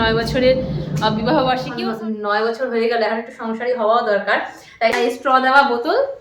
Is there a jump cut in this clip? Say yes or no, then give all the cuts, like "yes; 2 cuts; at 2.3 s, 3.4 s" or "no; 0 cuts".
yes; 2 cuts; at 1.7 s, 4.9 s